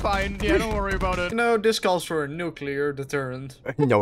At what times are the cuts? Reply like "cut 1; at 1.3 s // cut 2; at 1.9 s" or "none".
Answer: cut 1; at 1.3 s